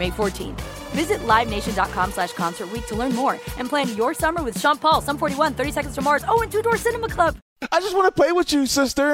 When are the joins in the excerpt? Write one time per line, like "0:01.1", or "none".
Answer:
0:07.6